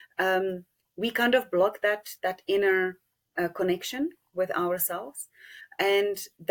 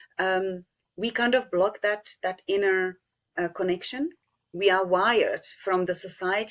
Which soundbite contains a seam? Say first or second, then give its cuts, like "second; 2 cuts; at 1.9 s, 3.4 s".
second; 1 cut; at 4.2 s